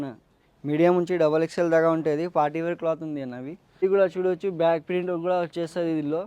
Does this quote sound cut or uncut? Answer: cut